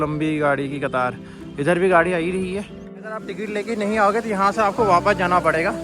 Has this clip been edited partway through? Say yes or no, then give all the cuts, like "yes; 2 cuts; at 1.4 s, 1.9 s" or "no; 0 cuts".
yes; 1 cut; at 3.1 s